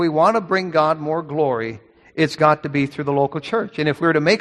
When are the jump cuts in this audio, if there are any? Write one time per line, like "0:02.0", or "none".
none